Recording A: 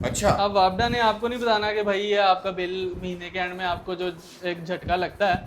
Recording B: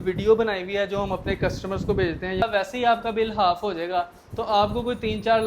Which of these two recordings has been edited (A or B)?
B